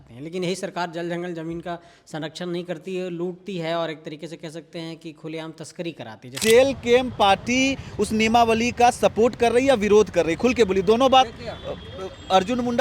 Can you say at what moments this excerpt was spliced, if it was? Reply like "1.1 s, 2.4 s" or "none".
6.4 s